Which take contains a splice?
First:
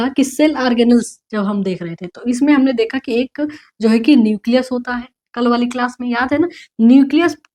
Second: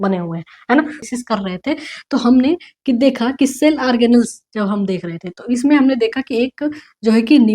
second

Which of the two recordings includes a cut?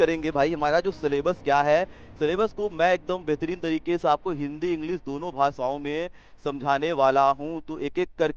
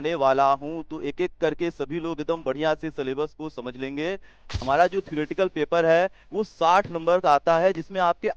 second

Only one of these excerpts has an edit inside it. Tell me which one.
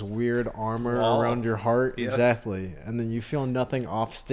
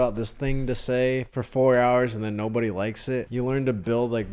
second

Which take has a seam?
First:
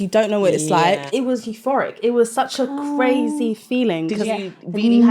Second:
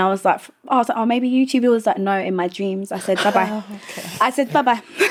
first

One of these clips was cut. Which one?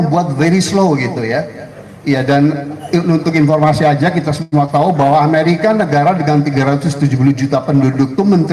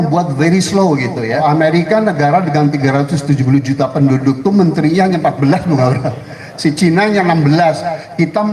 second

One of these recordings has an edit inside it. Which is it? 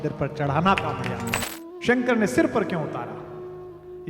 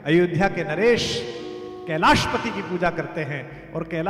first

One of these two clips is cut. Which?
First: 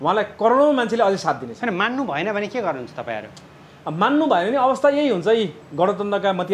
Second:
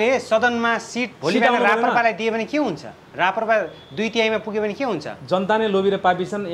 second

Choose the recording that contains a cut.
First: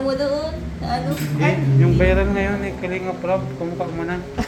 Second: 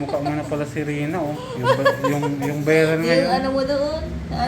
second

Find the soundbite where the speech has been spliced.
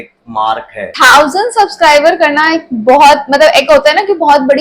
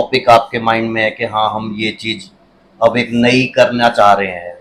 first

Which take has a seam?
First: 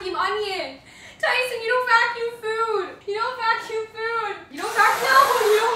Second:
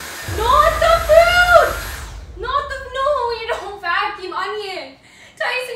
first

